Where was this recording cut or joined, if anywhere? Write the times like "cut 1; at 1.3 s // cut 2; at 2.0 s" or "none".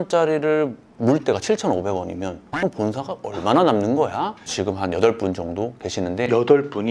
cut 1; at 4.5 s